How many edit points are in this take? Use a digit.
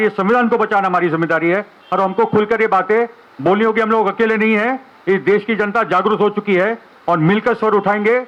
0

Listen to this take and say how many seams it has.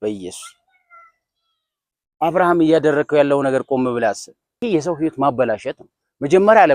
1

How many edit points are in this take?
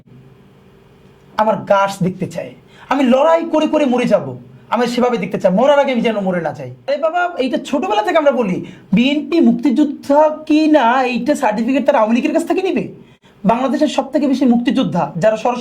1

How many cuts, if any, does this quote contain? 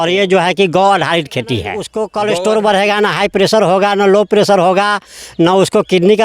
1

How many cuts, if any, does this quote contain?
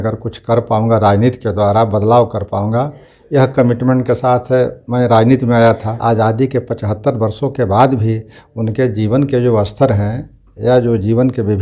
1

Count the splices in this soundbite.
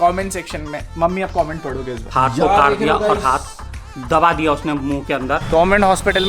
2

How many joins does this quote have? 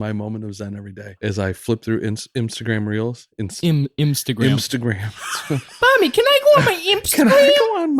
1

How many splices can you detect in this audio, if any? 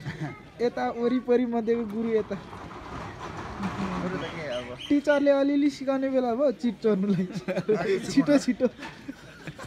0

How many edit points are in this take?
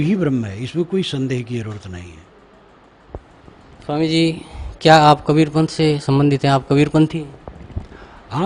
1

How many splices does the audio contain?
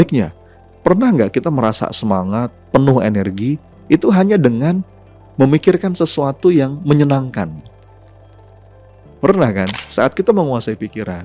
1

